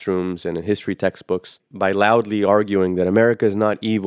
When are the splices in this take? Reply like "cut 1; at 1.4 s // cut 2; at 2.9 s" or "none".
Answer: none